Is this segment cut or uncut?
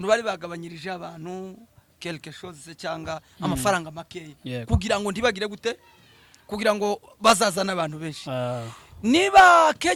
uncut